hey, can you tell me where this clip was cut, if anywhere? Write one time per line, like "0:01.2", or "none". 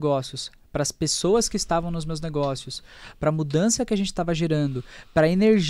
none